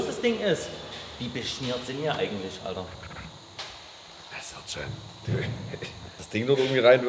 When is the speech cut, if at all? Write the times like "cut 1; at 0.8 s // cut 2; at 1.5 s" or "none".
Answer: cut 1; at 3.6 s // cut 2; at 6.1 s